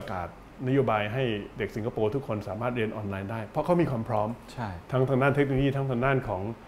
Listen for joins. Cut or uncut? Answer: uncut